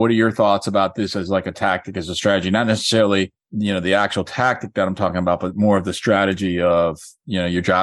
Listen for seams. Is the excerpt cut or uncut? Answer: uncut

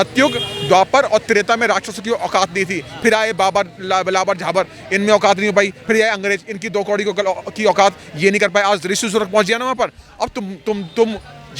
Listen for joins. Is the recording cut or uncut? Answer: uncut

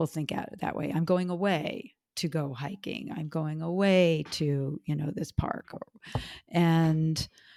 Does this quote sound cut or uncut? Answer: uncut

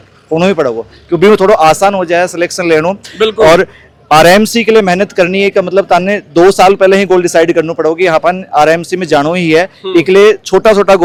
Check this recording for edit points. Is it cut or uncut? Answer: uncut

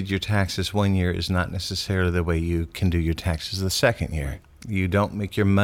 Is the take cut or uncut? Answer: uncut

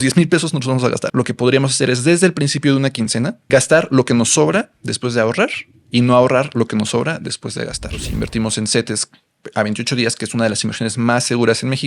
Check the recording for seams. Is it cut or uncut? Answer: cut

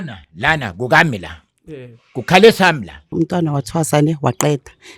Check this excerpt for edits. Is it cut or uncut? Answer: cut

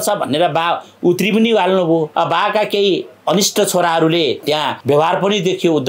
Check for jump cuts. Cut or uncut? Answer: cut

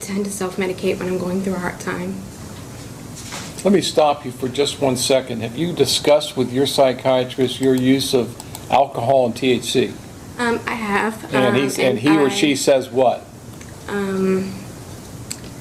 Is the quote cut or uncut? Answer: uncut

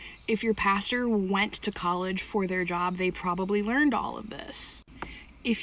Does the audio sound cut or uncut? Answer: cut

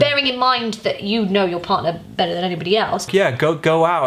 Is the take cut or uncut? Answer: cut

